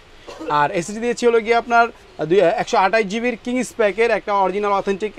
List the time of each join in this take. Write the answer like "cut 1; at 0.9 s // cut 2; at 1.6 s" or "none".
none

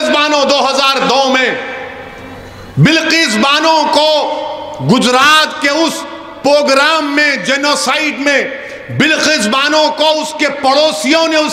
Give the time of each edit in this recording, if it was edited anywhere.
none

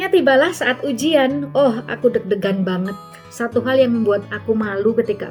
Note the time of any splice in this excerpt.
none

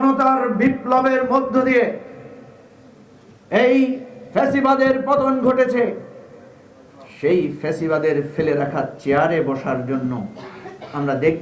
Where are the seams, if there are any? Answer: none

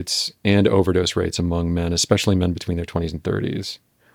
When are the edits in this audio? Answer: none

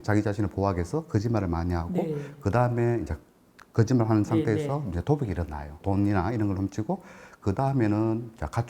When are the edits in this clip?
cut 1; at 5.7 s

